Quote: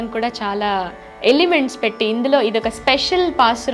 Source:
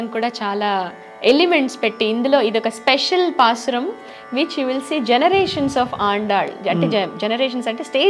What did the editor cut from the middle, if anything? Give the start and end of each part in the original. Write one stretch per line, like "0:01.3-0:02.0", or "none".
none